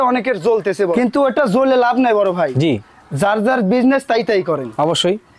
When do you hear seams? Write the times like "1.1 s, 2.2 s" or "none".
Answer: 0.9 s